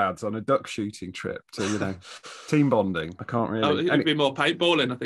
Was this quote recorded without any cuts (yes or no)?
no